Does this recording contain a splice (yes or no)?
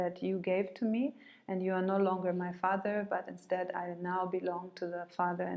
no